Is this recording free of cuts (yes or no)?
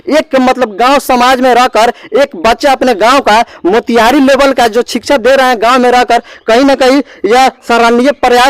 yes